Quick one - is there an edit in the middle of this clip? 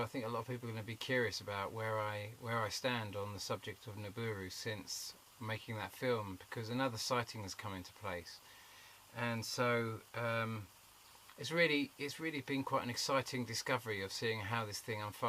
yes; 1 cut; at 5.5 s

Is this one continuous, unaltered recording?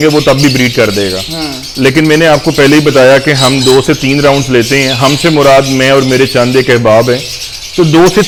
yes; 0 cuts

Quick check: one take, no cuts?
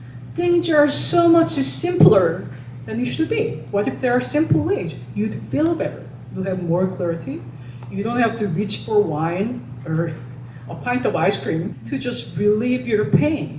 no; 1 cut; at 11.8 s

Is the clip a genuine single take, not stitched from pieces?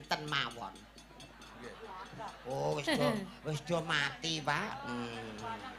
yes; 0 cuts

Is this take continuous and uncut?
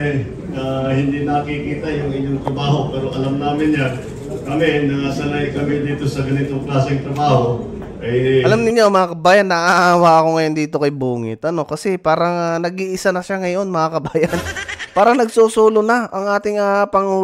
yes; 0 cuts

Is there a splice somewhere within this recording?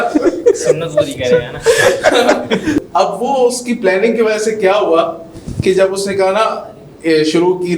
yes; 1 cut; at 2.8 s

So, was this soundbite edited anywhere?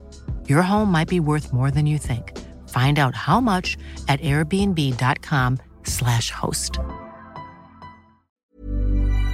yes; 1 cut; at 8.4 s

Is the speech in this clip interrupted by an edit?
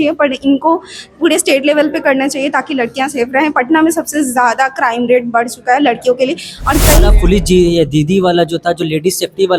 yes; 1 cut; at 7.1 s

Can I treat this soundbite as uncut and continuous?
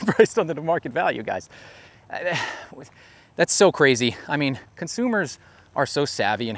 yes; 0 cuts

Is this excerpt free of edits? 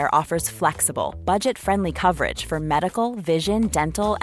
yes; 0 cuts

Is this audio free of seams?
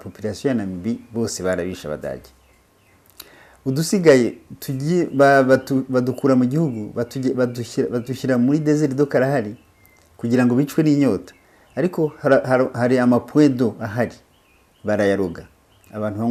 yes; 0 cuts

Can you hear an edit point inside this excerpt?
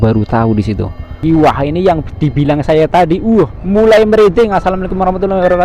yes; 1 cut; at 1.2 s

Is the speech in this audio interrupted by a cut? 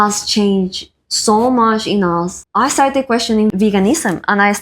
yes; 2 cuts; at 2.4 s, 3.5 s

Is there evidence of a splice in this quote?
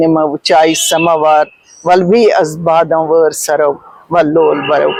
no; 0 cuts

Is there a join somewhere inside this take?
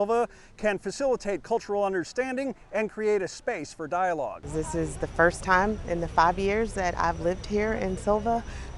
no; 0 cuts

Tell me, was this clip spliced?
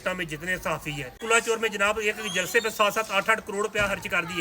yes; 1 cut; at 1.2 s

